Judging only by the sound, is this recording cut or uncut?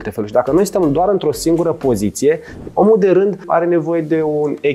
cut